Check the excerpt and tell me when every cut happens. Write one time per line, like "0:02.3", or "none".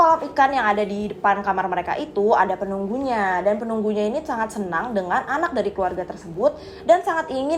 none